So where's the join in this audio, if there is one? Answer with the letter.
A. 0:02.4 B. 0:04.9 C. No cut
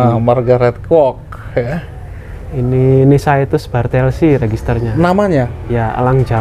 C